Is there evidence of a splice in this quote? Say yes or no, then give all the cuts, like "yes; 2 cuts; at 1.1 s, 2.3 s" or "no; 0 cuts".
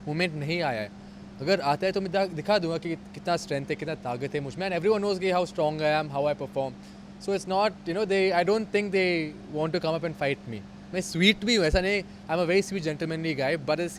no; 0 cuts